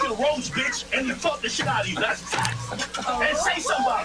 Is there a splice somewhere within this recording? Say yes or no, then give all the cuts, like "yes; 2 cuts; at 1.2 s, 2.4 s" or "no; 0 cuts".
no; 0 cuts